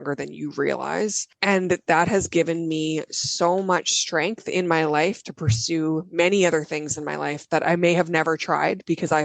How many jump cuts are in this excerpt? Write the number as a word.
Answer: one